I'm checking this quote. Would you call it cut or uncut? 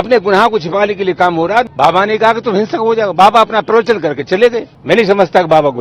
cut